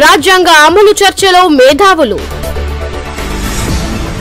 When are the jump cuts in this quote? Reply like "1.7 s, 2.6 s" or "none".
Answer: none